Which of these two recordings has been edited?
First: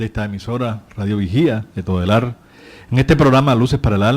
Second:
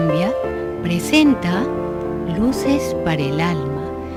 first; 1 cut; at 1.0 s

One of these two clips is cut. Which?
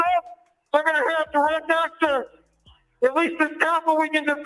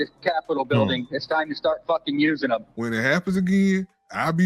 second; 1 cut; at 2.7 s

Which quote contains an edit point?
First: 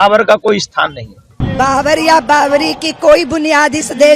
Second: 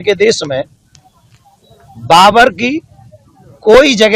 first; 1 cut; at 1.3 s

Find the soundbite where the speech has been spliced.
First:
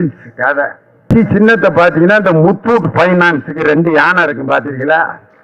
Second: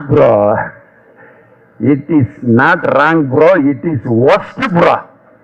first; 1 cut; at 1.0 s

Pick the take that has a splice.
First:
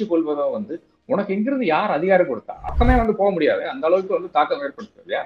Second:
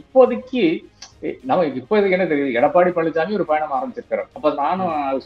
first; 1 cut; at 2.6 s

